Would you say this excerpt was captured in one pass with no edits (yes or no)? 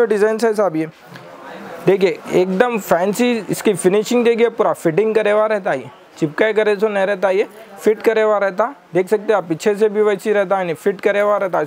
yes